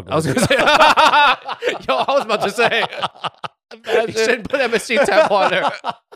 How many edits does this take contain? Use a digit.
0